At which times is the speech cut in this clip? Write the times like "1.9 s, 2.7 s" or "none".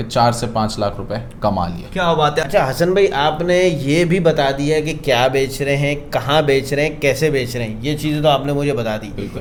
none